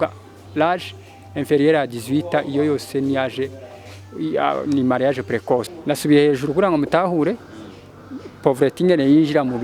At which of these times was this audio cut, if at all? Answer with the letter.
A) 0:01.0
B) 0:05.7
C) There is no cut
B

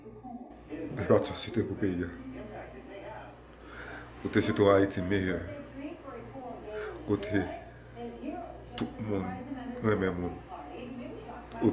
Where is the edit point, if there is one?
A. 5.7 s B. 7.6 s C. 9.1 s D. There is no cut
D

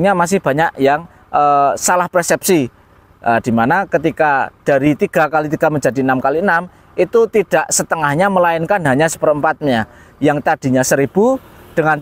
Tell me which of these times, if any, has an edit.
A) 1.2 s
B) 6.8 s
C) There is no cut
C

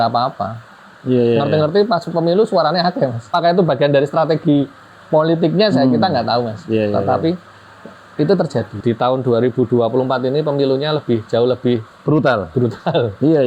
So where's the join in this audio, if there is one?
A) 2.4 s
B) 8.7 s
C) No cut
B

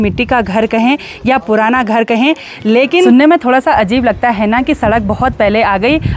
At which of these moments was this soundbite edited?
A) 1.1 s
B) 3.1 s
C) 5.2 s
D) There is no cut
B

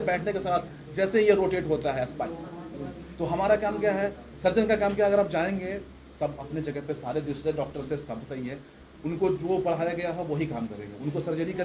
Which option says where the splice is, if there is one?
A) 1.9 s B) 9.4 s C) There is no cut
C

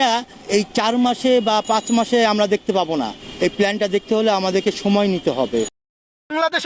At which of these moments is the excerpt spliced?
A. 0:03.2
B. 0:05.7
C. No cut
B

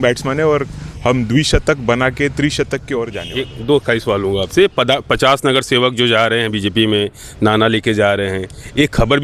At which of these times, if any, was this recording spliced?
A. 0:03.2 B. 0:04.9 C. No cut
A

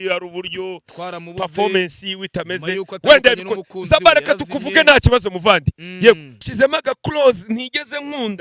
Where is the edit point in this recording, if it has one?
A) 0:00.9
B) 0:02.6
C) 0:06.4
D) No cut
C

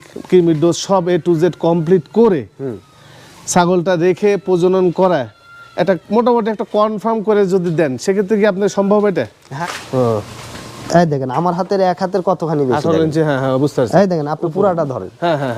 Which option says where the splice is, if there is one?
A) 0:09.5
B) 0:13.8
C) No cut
A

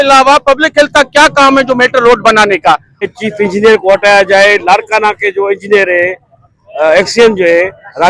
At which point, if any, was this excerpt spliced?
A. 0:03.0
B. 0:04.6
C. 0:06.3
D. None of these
A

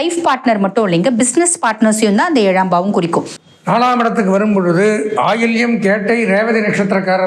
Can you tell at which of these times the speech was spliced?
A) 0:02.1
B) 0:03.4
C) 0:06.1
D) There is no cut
B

